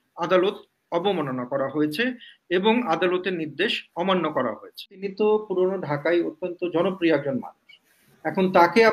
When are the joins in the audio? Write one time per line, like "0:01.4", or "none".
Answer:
0:05.1